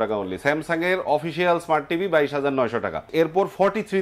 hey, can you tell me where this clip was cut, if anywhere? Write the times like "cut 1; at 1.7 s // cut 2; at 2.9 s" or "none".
cut 1; at 3.1 s